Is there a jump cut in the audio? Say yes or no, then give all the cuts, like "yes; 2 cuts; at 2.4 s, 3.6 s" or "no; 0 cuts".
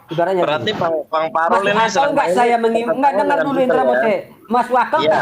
no; 0 cuts